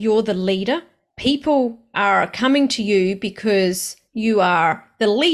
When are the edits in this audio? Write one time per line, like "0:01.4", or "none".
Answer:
none